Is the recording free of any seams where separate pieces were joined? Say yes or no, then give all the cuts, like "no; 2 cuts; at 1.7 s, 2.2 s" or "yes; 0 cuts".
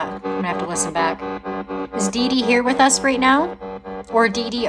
yes; 0 cuts